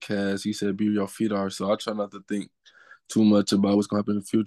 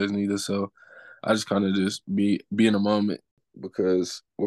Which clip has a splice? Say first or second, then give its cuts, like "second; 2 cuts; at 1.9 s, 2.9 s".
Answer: second; 1 cut; at 3.4 s